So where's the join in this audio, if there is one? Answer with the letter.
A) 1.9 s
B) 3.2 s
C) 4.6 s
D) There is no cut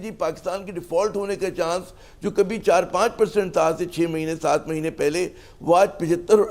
D